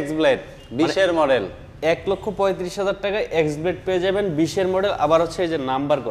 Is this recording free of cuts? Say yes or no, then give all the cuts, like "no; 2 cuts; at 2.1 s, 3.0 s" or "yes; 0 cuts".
yes; 0 cuts